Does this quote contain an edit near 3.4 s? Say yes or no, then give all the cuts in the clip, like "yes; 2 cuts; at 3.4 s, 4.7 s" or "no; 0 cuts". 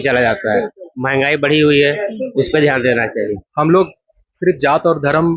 yes; 1 cut; at 3.4 s